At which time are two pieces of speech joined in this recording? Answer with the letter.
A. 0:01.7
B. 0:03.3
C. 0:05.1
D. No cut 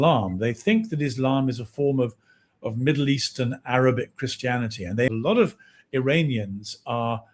C